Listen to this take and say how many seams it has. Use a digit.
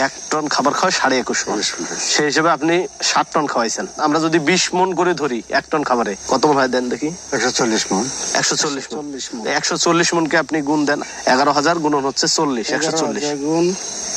0